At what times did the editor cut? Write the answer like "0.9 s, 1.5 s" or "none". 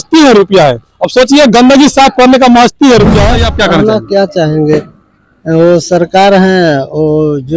3.4 s